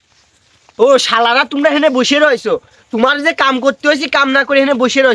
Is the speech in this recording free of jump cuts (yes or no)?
yes